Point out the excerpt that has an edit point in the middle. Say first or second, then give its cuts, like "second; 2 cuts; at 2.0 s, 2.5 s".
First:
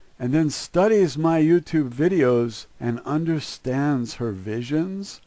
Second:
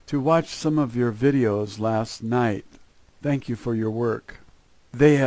first; 1 cut; at 3.3 s